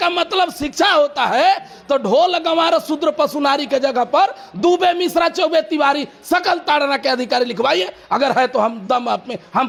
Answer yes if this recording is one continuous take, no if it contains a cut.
yes